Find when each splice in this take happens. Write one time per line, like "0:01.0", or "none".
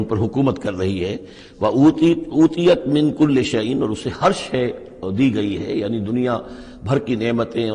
none